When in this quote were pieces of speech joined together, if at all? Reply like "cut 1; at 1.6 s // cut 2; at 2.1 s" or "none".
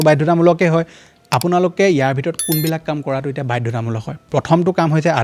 none